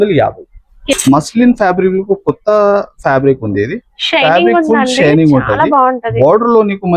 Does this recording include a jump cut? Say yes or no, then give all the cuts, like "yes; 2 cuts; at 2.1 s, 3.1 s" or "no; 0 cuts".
yes; 1 cut; at 0.9 s